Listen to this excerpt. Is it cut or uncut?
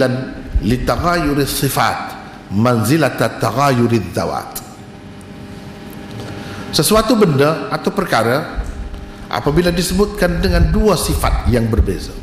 uncut